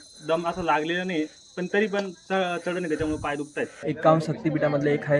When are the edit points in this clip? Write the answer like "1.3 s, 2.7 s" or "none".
3.8 s